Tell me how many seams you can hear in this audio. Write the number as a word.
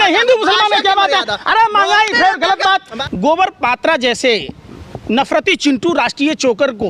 one